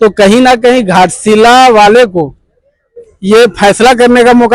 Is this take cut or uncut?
uncut